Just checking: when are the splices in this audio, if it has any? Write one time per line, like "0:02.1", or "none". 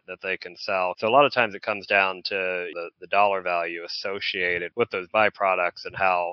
0:01.0
0:02.7
0:04.7